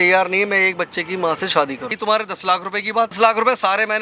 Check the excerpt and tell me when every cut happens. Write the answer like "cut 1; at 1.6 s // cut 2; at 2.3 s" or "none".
cut 1; at 2.0 s // cut 2; at 3.2 s